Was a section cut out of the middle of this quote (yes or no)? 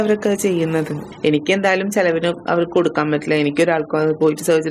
yes